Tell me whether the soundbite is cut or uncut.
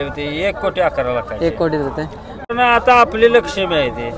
cut